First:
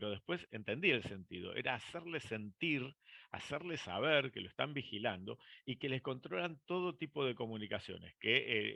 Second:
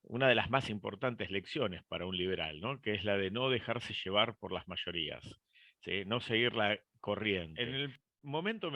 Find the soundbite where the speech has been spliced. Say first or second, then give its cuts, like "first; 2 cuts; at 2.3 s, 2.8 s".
second; 1 cut; at 7.5 s